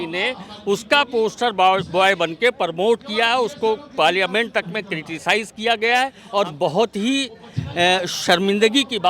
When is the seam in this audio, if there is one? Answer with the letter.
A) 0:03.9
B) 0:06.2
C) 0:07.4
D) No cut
B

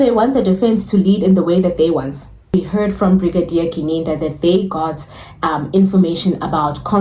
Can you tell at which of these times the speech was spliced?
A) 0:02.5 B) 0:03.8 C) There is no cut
A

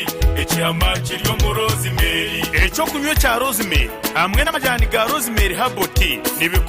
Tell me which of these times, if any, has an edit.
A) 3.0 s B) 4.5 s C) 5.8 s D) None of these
B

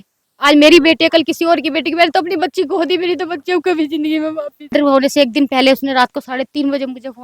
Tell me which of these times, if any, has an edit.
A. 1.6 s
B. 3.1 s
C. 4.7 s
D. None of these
C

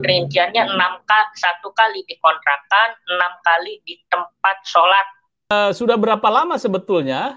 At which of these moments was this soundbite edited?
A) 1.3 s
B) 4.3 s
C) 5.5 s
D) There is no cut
C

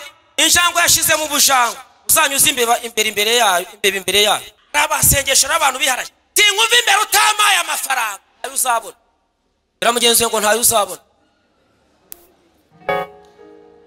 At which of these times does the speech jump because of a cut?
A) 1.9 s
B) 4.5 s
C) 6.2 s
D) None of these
B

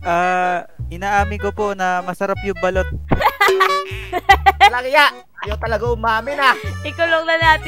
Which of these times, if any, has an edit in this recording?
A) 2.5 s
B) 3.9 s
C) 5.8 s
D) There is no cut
B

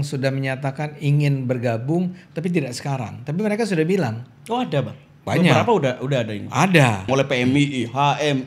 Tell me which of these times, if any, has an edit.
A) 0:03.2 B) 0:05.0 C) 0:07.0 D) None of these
C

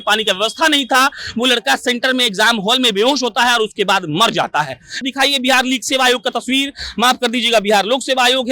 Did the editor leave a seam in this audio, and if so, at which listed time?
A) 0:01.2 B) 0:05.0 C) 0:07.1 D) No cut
B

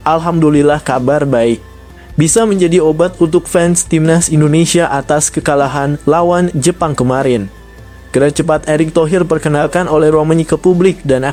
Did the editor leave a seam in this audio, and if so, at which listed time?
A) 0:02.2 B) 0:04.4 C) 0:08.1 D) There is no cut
D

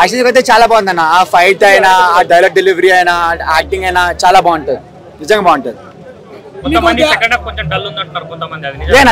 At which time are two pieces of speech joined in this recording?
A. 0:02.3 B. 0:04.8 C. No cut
C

